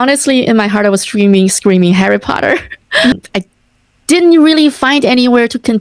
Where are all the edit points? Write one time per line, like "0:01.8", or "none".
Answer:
0:03.1

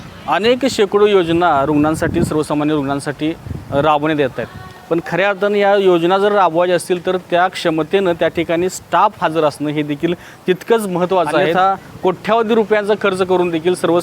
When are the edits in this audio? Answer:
0:11.5

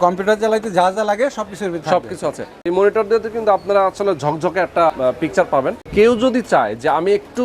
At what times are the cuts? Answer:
0:02.5
0:05.8

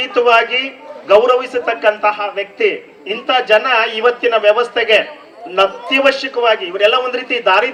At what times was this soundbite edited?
none

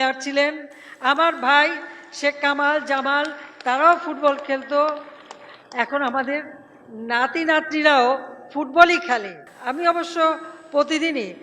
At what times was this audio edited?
0:09.4

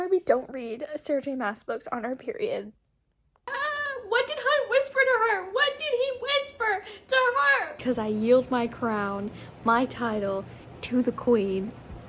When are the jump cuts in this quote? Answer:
0:03.4
0:07.8

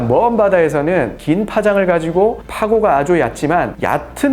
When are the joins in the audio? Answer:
0:01.2

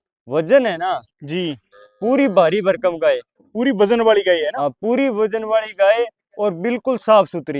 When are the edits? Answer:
none

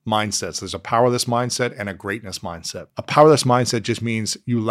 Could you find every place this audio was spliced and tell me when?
0:02.9

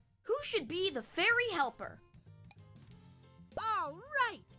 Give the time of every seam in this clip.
0:02.1
0:03.6

